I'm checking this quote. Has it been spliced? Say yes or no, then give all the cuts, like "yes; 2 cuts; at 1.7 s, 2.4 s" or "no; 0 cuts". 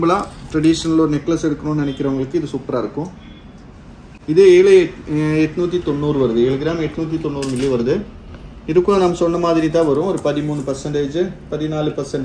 no; 0 cuts